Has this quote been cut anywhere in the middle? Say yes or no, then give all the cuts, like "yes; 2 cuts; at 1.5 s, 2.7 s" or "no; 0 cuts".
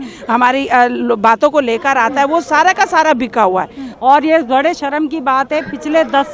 yes; 1 cut; at 3.8 s